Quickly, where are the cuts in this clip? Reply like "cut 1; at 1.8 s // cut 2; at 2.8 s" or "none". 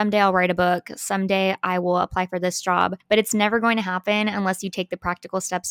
cut 1; at 3.0 s